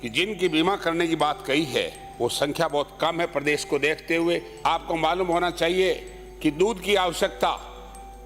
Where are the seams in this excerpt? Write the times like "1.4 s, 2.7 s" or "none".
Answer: 4.5 s